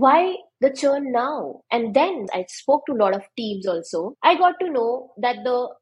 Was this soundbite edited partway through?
yes; 2 cuts; at 2.2 s, 4.1 s

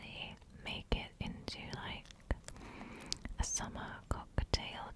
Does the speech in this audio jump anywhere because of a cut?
no; 0 cuts

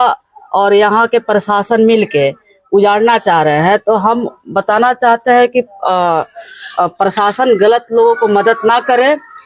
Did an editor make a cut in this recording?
no; 0 cuts

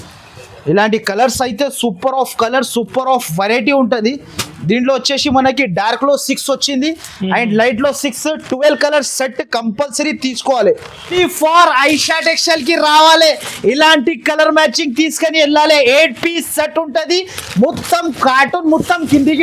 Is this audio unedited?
no; 1 cut; at 11.2 s

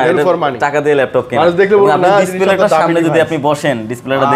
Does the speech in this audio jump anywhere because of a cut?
no; 0 cuts

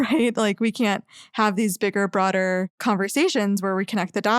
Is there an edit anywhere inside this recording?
yes; 1 cut; at 2.7 s

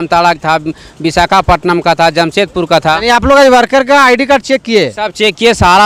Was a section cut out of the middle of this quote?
no; 0 cuts

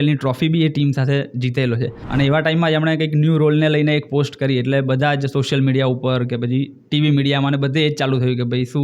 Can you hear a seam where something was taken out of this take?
yes; 1 cut; at 2.0 s

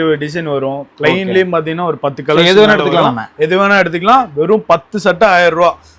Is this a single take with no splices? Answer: yes; 0 cuts

